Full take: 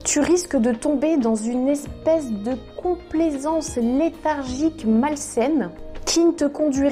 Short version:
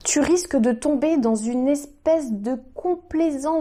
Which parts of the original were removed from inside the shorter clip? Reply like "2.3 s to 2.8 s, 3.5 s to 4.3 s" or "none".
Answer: none